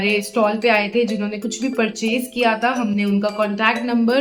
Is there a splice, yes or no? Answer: no